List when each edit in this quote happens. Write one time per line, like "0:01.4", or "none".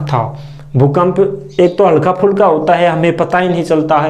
none